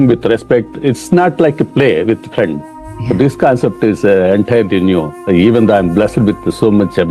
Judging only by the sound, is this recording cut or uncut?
uncut